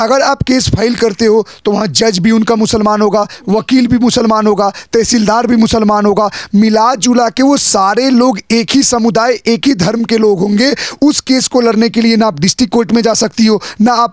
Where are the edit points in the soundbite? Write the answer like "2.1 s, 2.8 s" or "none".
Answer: none